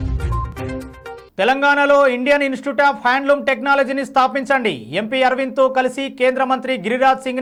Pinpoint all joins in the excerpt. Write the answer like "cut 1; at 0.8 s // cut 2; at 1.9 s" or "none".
none